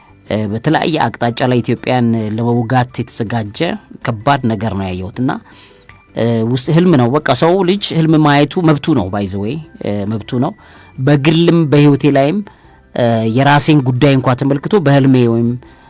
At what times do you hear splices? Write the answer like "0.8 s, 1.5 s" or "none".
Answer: none